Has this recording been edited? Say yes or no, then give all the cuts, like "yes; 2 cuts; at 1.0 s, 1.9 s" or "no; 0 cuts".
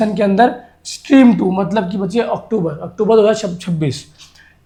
no; 0 cuts